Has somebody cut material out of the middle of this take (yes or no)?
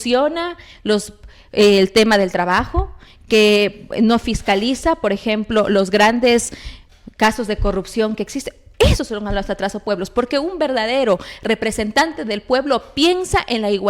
no